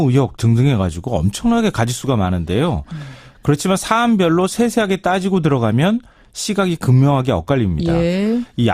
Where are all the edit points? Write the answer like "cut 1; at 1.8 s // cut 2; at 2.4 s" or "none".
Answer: none